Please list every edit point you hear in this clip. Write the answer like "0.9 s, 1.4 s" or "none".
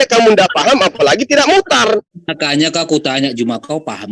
2.0 s